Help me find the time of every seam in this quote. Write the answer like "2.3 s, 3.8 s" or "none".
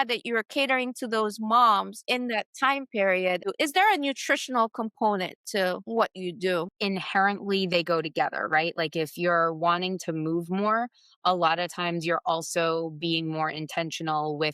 3.5 s, 6.7 s